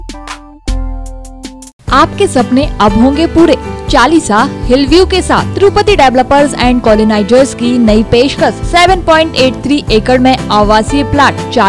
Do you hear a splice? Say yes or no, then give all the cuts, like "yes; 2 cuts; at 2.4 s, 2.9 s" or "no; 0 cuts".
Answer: no; 0 cuts